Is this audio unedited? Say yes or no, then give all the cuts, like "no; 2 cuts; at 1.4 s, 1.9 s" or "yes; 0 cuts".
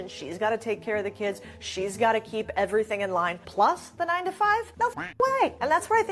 no; 2 cuts; at 1.1 s, 4.1 s